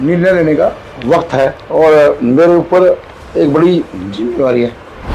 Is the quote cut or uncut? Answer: cut